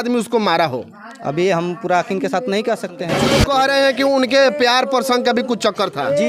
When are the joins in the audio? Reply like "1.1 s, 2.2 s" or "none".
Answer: 3.2 s